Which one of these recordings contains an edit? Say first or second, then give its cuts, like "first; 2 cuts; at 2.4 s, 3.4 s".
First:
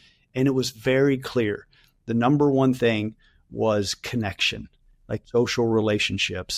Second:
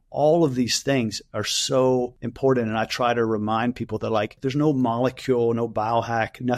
second; 2 cuts; at 2.2 s, 4.4 s